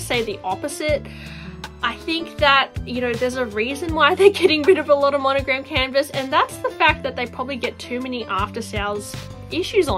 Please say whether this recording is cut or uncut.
uncut